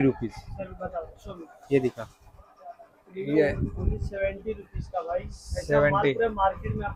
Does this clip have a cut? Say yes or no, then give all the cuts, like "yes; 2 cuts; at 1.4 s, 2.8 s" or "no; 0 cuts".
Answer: no; 0 cuts